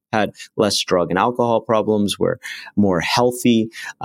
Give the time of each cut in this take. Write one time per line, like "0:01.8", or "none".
none